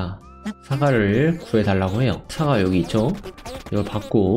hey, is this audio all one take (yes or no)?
no